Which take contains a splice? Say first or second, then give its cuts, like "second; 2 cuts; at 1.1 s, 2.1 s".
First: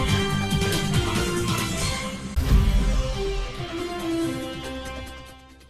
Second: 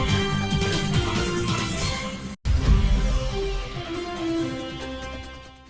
first; 1 cut; at 2.2 s